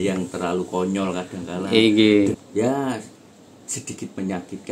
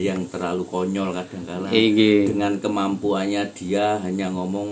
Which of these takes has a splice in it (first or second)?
first